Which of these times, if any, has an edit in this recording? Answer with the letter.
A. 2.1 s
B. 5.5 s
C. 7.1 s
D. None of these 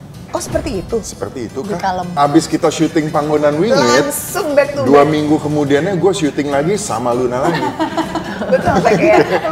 A